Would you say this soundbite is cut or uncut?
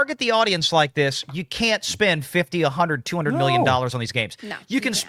uncut